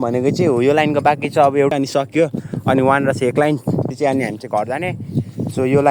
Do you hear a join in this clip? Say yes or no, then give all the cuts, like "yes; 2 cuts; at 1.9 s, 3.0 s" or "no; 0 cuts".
yes; 2 cuts; at 1.7 s, 3.9 s